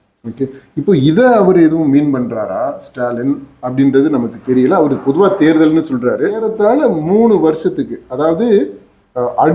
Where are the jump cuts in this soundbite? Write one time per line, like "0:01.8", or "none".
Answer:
0:06.5